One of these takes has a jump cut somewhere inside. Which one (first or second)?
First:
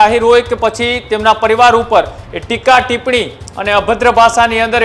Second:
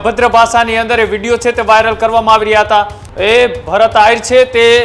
second